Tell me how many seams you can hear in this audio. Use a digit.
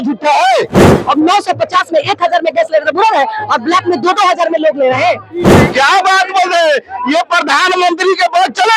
2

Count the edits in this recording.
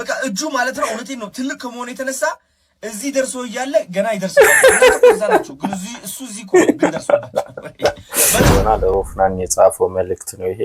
1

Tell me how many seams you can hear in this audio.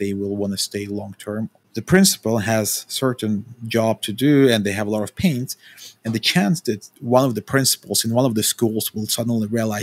1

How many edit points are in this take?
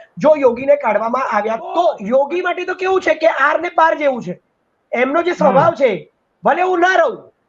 1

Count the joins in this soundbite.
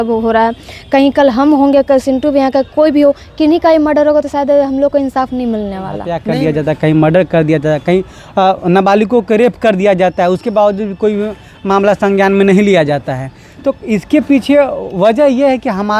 1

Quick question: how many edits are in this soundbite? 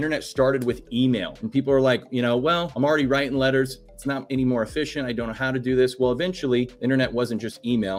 3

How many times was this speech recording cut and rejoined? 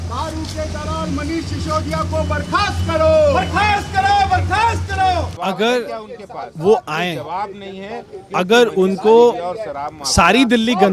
1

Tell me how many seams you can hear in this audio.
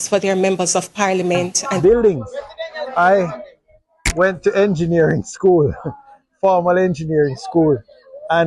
1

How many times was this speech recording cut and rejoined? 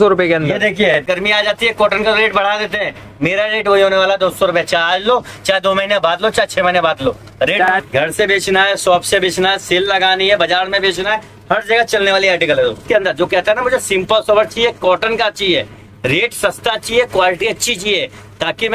3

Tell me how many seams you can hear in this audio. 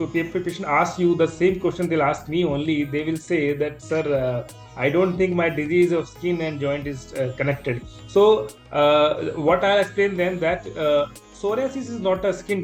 0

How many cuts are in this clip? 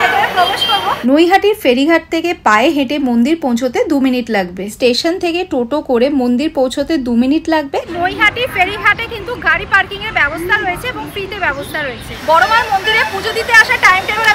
4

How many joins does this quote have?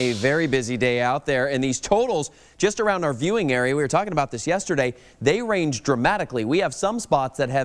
0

